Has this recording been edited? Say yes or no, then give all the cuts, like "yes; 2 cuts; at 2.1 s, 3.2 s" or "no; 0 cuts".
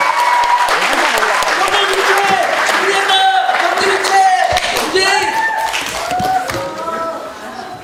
no; 0 cuts